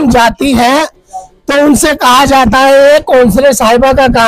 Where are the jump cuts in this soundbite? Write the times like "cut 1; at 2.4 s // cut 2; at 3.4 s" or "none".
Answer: none